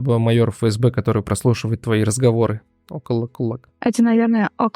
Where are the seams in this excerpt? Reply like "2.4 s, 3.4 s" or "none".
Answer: 3.7 s